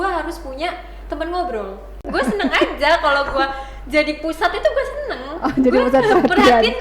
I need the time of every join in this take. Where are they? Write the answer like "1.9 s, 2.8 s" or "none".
1.9 s

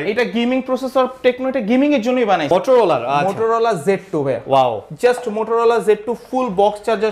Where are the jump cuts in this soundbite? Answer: 2.4 s

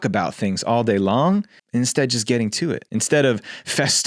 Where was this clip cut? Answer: 1.6 s, 2.8 s

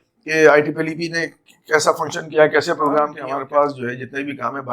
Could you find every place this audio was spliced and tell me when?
3.2 s

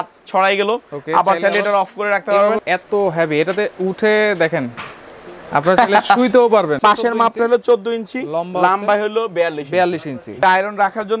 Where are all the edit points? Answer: 2.6 s, 6.8 s, 10.4 s

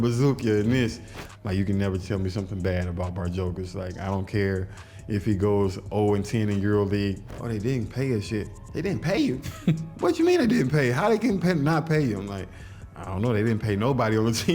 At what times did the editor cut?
1.1 s, 7.3 s

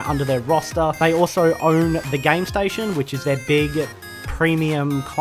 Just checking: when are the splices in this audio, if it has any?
2.2 s

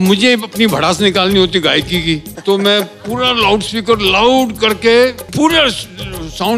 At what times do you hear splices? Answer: 2.3 s, 5.2 s

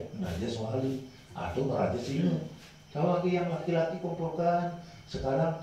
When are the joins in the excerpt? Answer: none

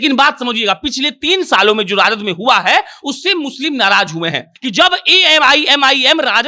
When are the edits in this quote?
4.5 s

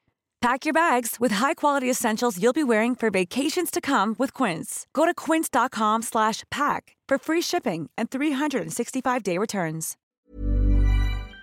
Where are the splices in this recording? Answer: 9.9 s

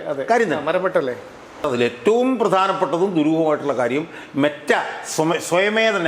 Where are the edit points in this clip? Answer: 1.7 s

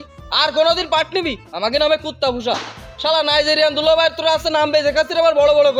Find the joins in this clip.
none

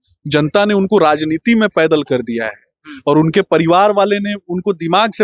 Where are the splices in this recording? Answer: none

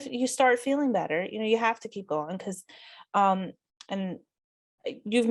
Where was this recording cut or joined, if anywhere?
none

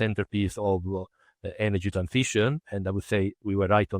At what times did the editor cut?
none

